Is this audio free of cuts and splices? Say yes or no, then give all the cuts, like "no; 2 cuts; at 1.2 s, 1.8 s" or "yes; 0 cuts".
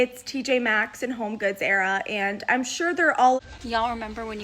no; 1 cut; at 3.4 s